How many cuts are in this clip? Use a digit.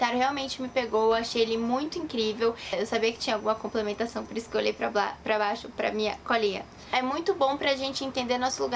2